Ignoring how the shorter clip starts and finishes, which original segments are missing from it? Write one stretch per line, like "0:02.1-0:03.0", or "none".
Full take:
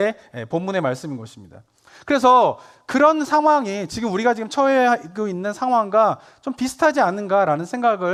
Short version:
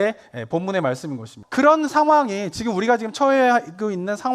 0:01.4-0:02.7